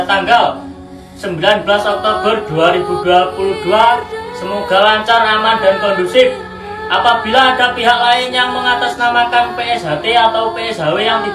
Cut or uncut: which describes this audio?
uncut